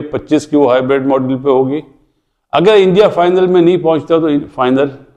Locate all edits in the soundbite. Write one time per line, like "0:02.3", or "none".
none